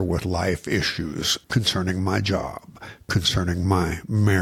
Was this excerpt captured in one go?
no; 1 cut; at 1.3 s

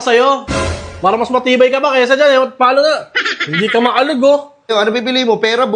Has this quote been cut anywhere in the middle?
yes; 1 cut; at 4.7 s

